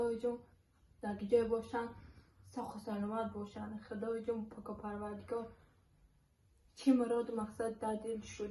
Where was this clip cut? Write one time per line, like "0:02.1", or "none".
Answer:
none